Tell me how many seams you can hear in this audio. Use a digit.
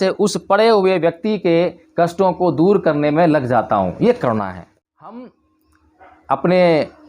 1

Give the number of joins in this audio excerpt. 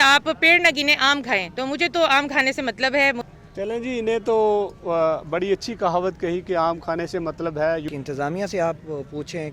2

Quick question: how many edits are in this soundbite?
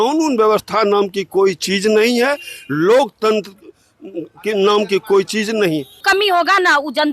1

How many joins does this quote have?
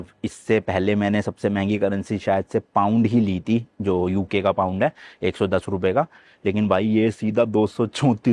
0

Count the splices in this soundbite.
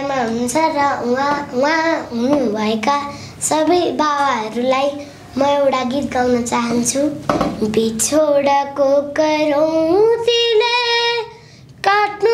1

